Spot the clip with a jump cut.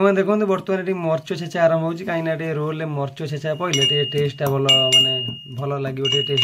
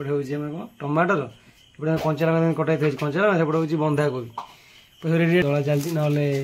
second; 1 cut; at 5.4 s

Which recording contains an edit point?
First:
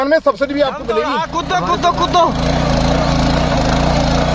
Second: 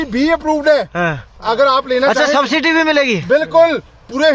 first; 1 cut; at 1.4 s

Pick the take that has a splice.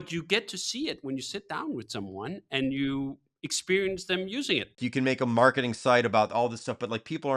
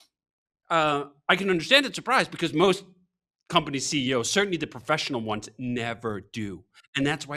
first; 1 cut; at 4.7 s

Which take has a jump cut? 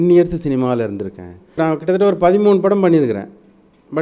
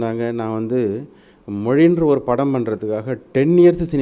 first; 1 cut; at 1.6 s

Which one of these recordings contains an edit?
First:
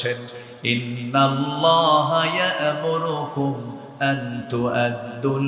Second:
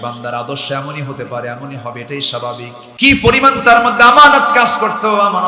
second; 1 cut; at 2.8 s

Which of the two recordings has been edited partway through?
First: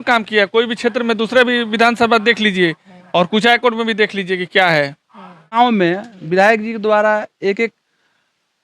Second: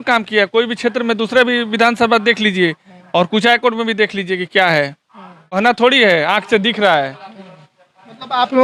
first; 1 cut; at 5.5 s

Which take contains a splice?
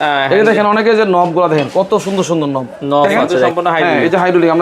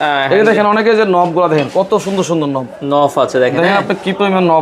first; 1 cut; at 3.5 s

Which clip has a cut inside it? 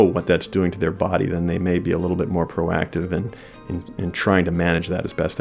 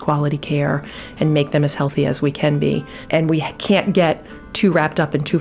second; 1 cut; at 2.9 s

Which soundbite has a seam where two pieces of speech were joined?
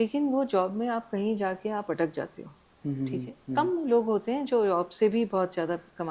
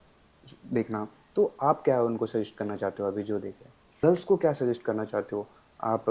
second; 1 cut; at 3.9 s

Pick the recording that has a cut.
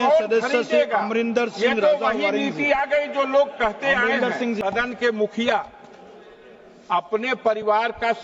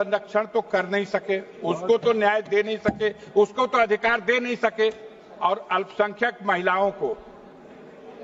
first; 1 cut; at 4.6 s

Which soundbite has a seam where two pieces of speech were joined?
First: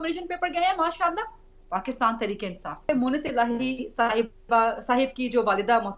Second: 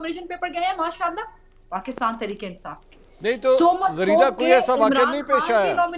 first; 1 cut; at 2.9 s

